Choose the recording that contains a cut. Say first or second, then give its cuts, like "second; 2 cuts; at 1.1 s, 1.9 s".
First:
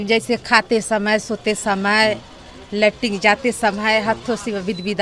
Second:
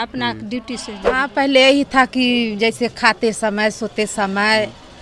second; 1 cut; at 1.3 s